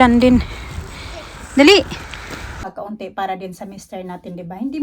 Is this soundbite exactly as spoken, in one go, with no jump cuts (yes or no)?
no